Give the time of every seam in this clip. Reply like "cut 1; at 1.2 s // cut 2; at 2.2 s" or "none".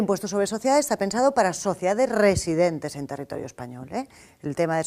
cut 1; at 2.3 s